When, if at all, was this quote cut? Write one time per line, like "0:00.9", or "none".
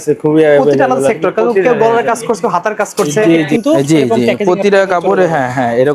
0:03.5